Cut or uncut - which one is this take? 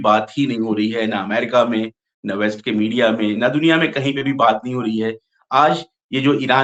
uncut